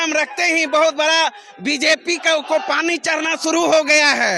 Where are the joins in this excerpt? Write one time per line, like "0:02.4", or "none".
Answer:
none